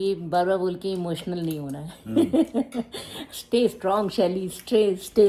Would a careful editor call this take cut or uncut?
uncut